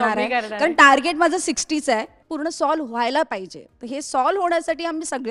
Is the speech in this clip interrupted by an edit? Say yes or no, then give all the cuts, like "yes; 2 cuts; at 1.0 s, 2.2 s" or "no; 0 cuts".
yes; 1 cut; at 2.2 s